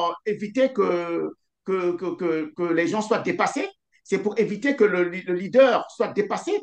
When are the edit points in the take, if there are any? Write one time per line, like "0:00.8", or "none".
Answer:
none